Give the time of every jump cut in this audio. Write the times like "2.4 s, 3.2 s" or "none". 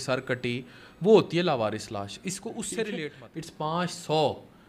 3.2 s